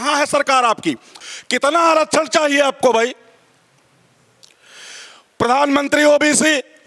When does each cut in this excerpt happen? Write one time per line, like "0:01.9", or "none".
0:01.1